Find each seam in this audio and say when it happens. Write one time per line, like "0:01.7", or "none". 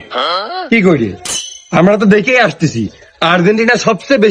none